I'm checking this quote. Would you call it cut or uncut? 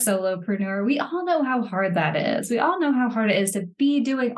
uncut